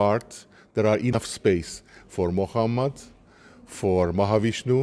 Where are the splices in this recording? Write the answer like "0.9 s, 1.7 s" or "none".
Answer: 1.2 s